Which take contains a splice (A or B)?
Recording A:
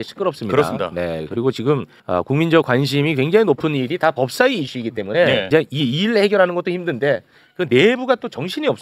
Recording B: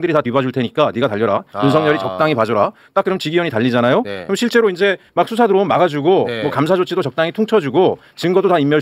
A